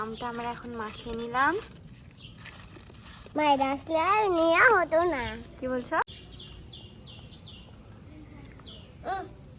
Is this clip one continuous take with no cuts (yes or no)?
no